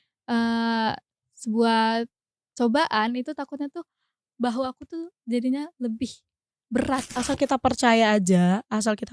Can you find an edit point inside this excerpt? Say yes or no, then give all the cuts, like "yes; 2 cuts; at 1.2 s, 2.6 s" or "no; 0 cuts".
yes; 1 cut; at 7.1 s